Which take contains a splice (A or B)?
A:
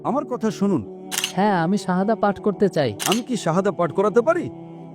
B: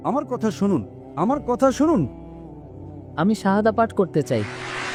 A